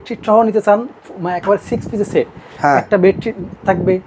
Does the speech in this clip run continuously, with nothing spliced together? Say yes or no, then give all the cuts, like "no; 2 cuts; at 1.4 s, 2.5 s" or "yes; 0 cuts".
yes; 0 cuts